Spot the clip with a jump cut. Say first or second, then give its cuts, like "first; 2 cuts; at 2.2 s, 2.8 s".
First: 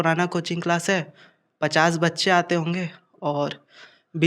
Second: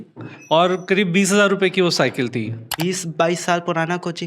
second; 1 cut; at 2.6 s